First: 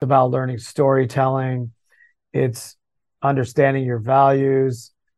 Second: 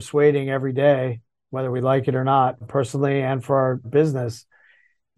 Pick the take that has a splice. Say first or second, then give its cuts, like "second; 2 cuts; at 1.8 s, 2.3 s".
second; 2 cuts; at 2.6 s, 3.9 s